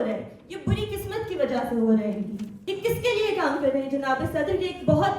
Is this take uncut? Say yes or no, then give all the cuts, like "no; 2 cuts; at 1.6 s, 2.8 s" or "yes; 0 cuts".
no; 1 cut; at 2.5 s